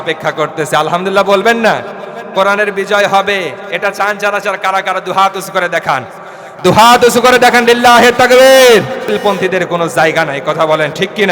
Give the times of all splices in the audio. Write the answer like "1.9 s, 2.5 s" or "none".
9.2 s